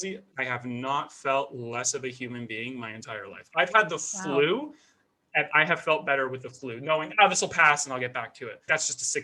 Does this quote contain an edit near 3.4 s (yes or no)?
no